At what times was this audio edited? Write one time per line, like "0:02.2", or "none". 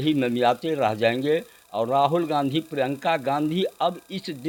none